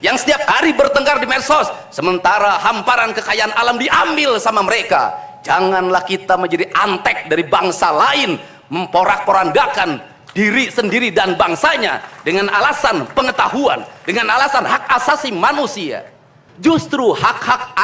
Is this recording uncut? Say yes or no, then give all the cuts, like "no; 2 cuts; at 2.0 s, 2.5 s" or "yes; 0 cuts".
no; 1 cut; at 16.4 s